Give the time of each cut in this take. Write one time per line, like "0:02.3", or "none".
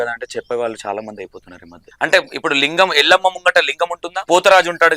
0:01.8
0:04.1